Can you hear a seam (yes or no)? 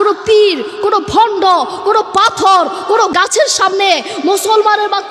no